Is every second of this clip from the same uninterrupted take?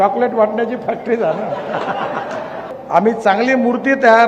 no; 1 cut; at 2.7 s

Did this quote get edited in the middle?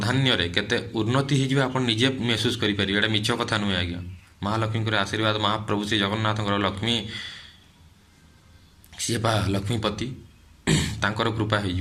no; 0 cuts

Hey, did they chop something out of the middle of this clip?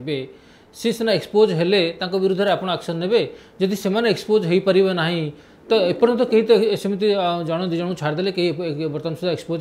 no; 0 cuts

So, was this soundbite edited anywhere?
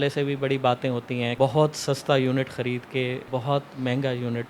yes; 2 cuts; at 1.3 s, 3.2 s

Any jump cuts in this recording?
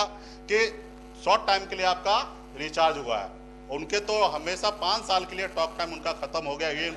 no; 0 cuts

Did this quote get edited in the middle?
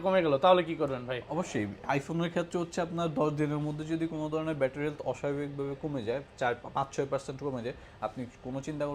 no; 0 cuts

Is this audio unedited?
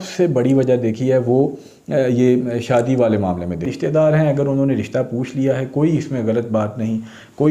no; 1 cut; at 3.7 s

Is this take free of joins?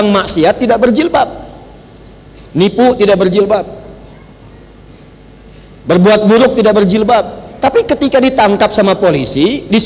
yes; 0 cuts

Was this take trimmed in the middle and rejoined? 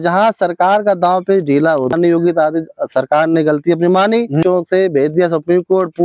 yes; 2 cuts; at 1.9 s, 4.4 s

